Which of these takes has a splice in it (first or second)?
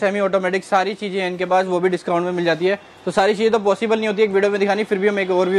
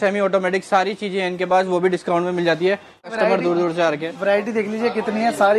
second